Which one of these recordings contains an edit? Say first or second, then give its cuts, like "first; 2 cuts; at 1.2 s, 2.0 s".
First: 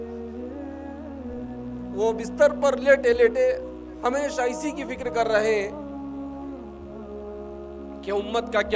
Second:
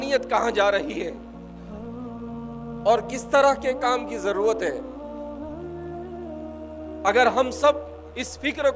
second; 4 cuts; at 1.1 s, 2.5 s, 4.8 s, 7.0 s